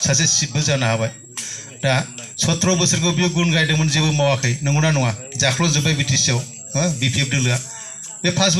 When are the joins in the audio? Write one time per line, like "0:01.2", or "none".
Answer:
none